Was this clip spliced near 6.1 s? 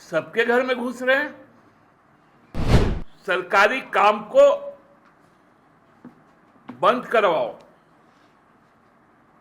no; 1 cut; at 2.6 s

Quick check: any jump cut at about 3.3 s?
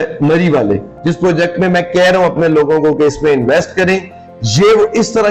no; 1 cut; at 0.9 s

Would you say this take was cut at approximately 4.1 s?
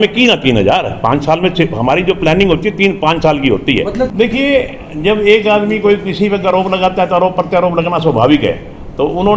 yes; 1 cut; at 4.1 s

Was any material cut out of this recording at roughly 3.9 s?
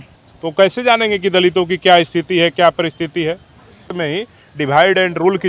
yes; 1 cut; at 3.9 s

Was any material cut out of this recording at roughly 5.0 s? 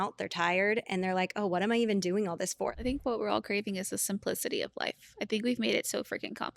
no; 1 cut; at 2.8 s

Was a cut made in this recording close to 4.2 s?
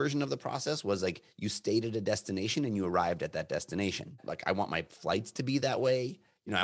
yes; 1 cut; at 4.2 s

